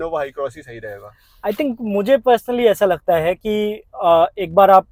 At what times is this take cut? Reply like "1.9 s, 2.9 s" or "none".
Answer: none